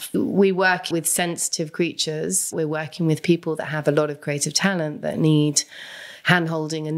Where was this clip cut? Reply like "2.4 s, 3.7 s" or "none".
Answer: 2.5 s